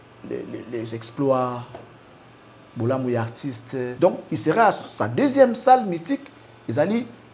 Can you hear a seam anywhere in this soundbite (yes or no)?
yes